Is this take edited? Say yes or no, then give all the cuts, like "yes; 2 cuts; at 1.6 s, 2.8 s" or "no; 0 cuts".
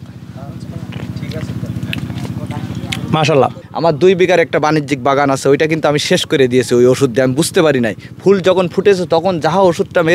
yes; 1 cut; at 3.6 s